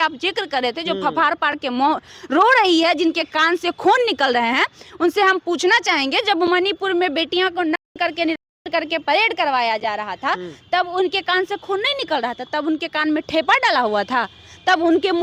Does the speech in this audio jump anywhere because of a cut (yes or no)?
no